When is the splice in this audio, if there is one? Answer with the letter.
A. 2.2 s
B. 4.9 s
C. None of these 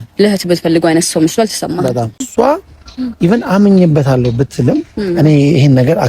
A